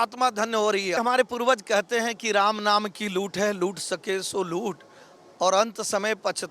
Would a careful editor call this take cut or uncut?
cut